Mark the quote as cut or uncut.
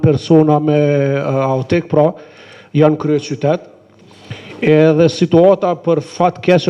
uncut